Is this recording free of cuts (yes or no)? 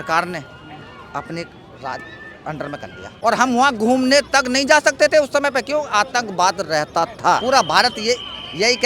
no